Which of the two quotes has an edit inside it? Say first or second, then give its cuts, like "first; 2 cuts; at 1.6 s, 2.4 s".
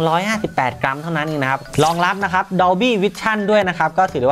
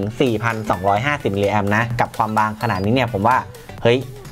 first; 1 cut; at 1.7 s